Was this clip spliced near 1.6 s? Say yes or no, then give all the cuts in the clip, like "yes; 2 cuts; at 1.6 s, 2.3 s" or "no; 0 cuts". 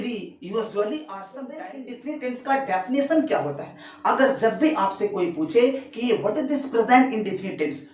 yes; 1 cut; at 1.6 s